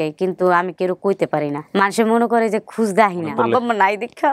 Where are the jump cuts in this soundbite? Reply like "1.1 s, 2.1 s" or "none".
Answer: 1.6 s, 3.3 s